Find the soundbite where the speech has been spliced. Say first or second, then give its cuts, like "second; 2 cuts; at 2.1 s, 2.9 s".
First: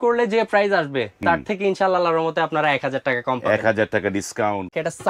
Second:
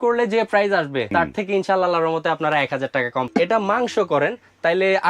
second; 2 cuts; at 1.1 s, 3.3 s